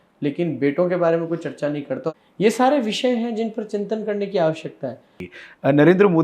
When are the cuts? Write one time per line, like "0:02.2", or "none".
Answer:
0:02.1
0:05.2